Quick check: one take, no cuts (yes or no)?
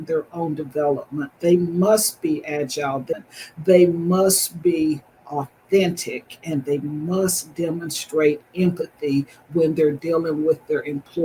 no